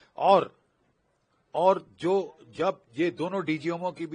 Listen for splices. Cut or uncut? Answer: uncut